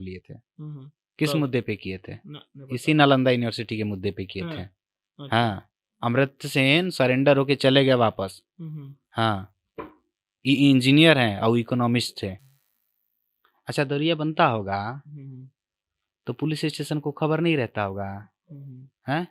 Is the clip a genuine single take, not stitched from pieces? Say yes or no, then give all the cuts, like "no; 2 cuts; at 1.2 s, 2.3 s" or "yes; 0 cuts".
no; 1 cut; at 12.5 s